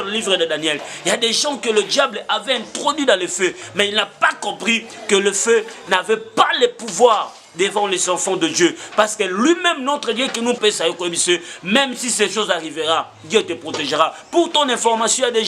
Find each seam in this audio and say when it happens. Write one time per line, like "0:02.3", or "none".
0:10.6